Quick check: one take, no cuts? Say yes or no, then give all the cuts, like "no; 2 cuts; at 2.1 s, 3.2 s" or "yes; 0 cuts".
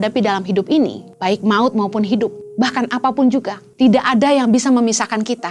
no; 3 cuts; at 1.1 s, 2.4 s, 3.6 s